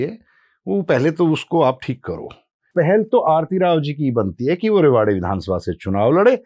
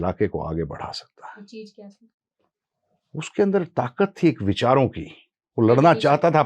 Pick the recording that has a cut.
first; 1 cut; at 2.7 s

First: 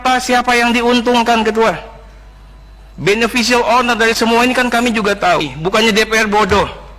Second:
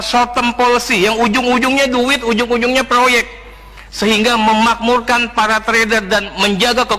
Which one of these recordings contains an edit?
first; 1 cut; at 5.5 s

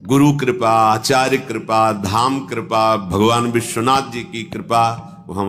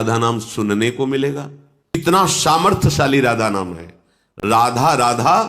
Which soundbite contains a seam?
second; 1 cut; at 2.0 s

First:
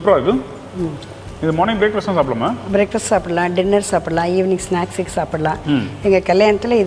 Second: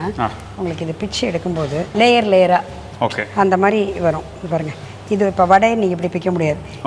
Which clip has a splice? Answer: second; 1 cut; at 1.9 s

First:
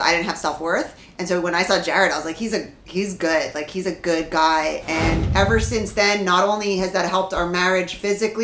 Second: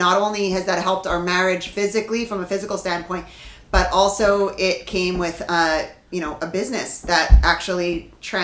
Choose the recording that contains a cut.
first; 1 cut; at 5.2 s

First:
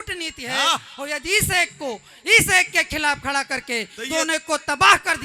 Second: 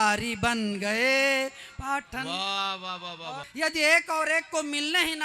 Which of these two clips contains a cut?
second; 1 cut; at 3.4 s

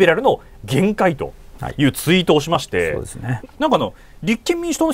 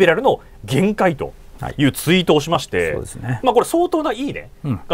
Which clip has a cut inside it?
first; 1 cut; at 3.3 s

